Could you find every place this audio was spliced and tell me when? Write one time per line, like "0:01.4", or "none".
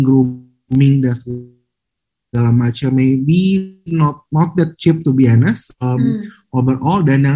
none